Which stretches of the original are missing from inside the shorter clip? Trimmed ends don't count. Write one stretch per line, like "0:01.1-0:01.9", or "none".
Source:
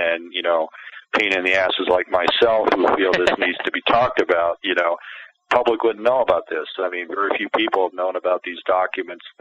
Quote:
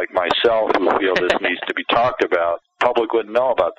0:04.6-0:05.3